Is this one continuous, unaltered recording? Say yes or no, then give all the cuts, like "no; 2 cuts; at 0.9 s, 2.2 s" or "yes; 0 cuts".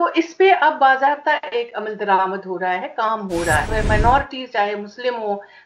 no; 1 cut; at 3.7 s